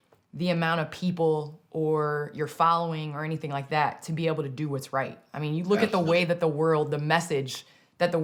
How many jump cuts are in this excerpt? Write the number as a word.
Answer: zero